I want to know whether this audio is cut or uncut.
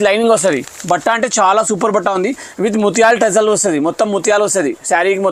uncut